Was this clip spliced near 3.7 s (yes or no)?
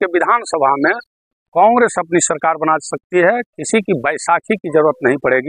no